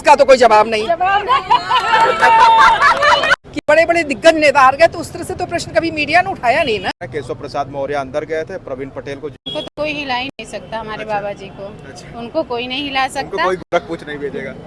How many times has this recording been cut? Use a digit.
3